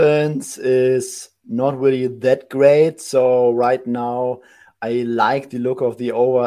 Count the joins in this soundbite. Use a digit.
0